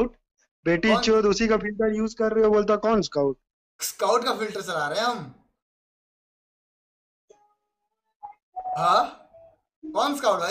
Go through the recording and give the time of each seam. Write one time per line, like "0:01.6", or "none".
none